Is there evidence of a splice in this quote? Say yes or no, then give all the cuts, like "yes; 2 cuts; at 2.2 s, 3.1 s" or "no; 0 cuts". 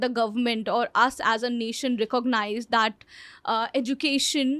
no; 0 cuts